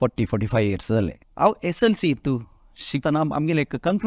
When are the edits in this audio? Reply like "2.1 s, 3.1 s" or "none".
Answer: 1.2 s, 3.0 s